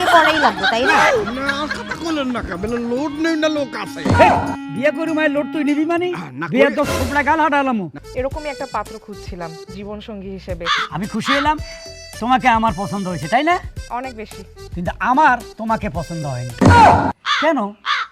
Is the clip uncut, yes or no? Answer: no